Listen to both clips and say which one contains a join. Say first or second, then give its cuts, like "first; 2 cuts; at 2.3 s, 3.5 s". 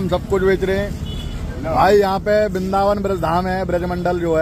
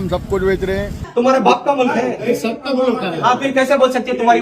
second; 1 cut; at 0.9 s